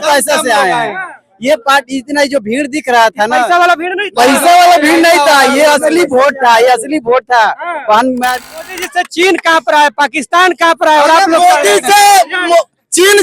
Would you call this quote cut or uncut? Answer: cut